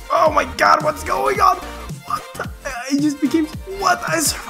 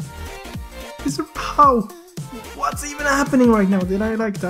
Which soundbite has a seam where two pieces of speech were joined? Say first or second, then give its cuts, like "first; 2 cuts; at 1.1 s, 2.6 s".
second; 1 cut; at 1.0 s